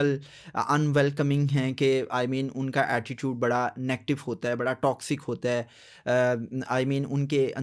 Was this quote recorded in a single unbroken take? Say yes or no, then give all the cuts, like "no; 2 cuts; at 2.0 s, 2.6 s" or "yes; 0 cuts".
yes; 0 cuts